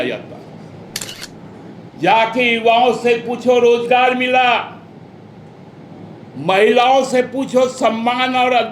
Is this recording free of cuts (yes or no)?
no